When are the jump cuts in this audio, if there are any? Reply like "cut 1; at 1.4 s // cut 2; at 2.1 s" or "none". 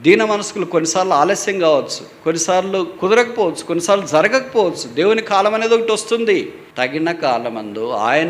cut 1; at 6.6 s